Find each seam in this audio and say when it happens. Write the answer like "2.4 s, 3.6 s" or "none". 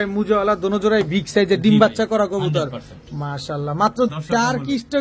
4.1 s